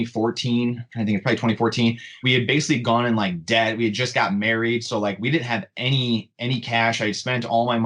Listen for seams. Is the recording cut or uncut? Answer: cut